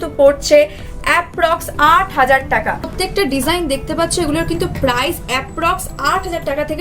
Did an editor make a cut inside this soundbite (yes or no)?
yes